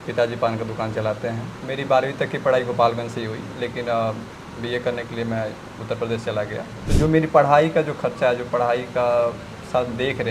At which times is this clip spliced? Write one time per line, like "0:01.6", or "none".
0:06.8